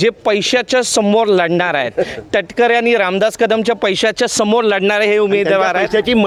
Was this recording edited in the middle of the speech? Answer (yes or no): no